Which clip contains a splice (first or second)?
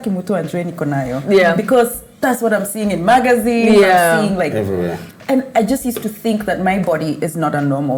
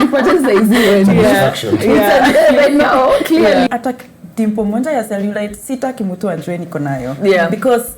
second